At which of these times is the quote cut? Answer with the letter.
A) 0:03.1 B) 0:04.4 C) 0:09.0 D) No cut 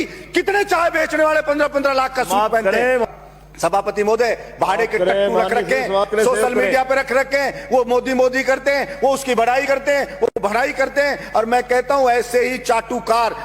A